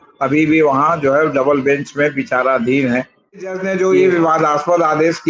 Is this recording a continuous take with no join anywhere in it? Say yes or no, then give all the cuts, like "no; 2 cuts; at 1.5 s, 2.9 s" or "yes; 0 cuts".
no; 1 cut; at 3.6 s